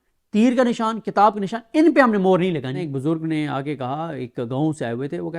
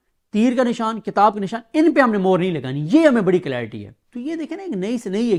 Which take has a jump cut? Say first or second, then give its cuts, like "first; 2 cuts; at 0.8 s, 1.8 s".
first; 1 cut; at 2.7 s